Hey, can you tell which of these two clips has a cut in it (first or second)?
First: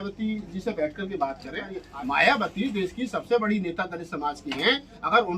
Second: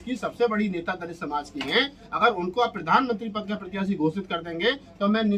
first